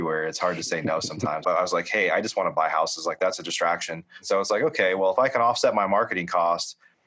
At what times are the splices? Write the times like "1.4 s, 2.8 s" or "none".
1.4 s, 4.2 s

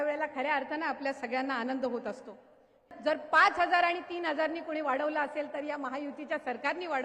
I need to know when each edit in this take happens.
2.8 s

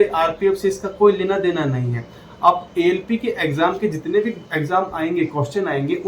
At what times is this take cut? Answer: none

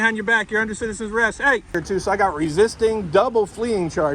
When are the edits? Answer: 1.8 s

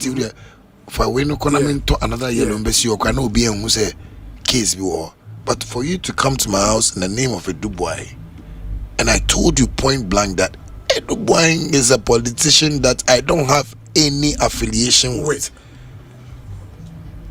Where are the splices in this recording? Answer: none

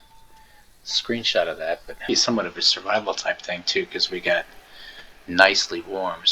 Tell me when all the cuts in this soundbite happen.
2.1 s

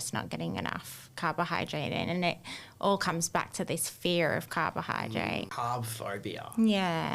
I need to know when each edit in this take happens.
5.5 s

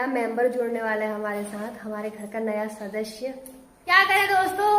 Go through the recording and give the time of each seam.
3.7 s

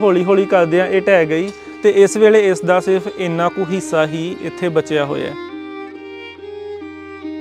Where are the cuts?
5.3 s

